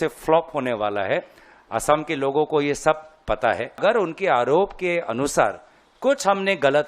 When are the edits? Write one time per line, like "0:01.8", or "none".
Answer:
0:03.8